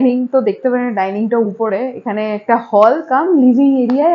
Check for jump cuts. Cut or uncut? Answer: uncut